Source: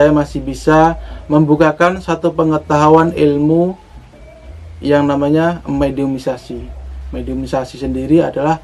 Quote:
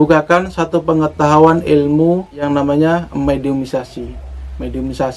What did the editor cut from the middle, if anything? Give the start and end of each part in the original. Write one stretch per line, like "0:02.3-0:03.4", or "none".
0:04.0-0:05.0